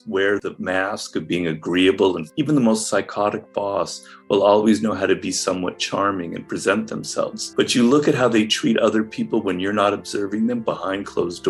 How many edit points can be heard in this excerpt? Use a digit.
2